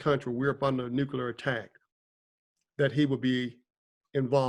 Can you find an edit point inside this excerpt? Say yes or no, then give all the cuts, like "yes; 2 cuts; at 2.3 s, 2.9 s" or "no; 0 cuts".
no; 0 cuts